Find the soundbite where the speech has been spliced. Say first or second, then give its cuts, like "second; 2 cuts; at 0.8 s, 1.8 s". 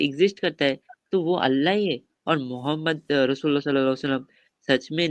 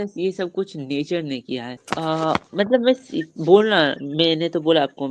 second; 1 cut; at 1.8 s